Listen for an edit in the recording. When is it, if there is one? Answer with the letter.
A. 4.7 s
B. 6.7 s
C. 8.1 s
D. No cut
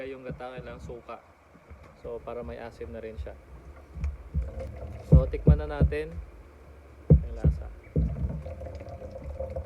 A